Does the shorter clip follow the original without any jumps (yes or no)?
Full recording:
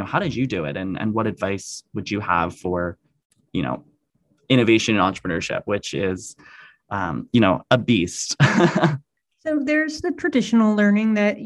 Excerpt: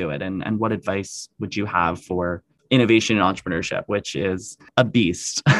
no